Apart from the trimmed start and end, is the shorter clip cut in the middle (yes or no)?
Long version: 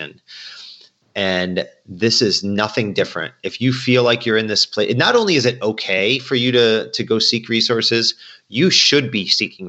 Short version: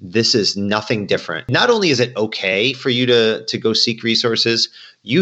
yes